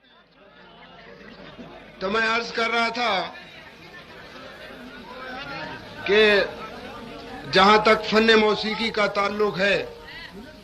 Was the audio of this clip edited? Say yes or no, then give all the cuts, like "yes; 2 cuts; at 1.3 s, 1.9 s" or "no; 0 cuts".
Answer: yes; 1 cut; at 1.3 s